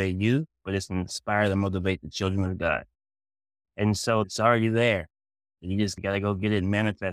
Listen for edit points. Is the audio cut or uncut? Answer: cut